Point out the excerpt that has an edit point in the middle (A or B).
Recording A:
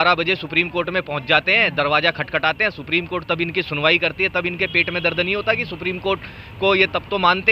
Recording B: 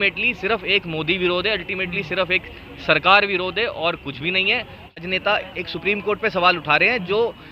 B